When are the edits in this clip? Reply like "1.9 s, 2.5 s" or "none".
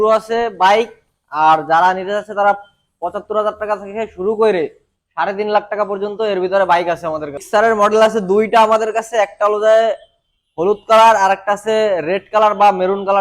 7.4 s